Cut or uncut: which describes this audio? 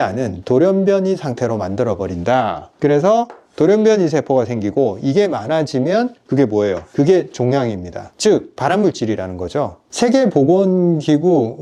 uncut